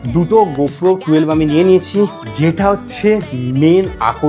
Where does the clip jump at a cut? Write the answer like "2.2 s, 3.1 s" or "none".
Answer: 2.2 s